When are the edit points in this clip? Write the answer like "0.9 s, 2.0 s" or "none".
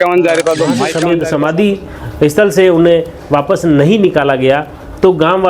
1.0 s